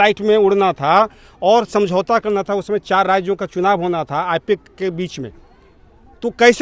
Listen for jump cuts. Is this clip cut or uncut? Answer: uncut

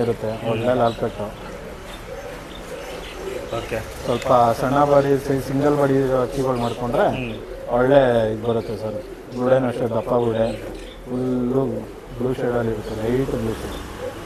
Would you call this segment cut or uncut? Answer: uncut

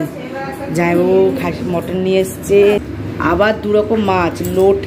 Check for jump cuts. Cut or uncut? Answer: cut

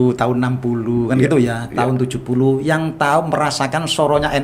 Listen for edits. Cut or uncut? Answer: uncut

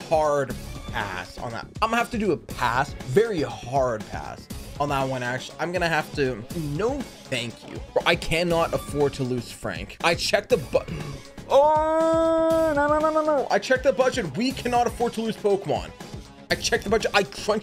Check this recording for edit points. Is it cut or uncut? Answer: cut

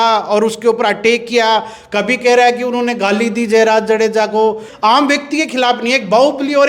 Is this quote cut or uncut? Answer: cut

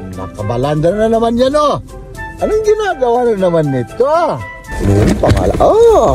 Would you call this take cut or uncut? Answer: cut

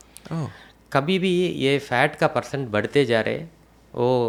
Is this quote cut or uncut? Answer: uncut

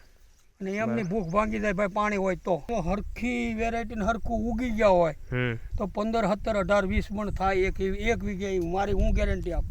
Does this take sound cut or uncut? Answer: cut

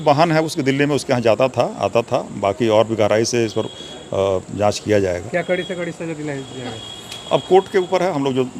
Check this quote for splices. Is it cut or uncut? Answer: uncut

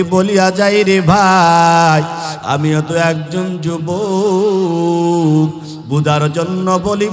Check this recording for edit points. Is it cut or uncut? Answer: uncut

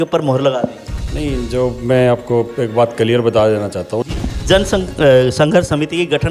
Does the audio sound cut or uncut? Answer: cut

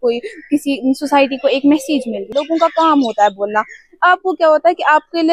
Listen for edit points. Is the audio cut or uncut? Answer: cut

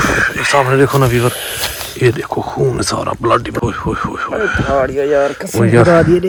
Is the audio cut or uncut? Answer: uncut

